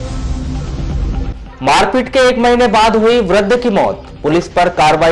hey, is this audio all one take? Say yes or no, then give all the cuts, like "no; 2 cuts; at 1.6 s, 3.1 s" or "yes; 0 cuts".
no; 1 cut; at 1.1 s